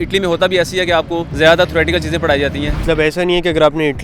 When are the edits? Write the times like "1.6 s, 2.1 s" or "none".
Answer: 2.8 s